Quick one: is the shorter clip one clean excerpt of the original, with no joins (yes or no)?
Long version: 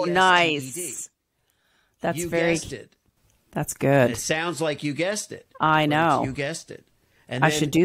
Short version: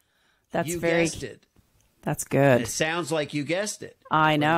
yes